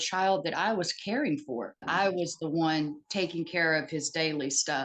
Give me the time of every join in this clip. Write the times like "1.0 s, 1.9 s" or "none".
1.8 s